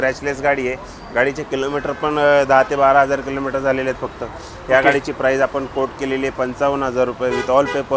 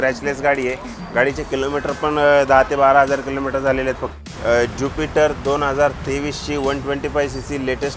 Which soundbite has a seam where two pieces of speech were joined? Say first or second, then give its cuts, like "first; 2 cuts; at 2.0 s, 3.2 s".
second; 1 cut; at 4.2 s